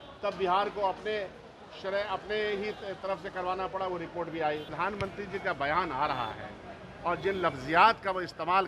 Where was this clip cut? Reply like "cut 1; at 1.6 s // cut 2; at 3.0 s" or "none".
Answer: cut 1; at 4.7 s